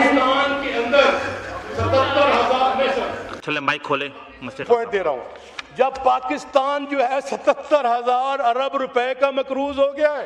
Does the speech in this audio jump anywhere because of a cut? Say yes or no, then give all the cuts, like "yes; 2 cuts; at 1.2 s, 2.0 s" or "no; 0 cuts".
no; 0 cuts